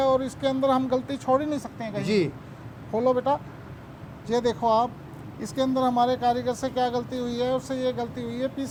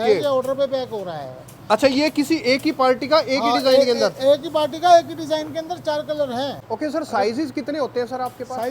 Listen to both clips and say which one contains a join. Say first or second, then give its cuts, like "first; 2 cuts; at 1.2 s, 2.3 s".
second; 1 cut; at 6.6 s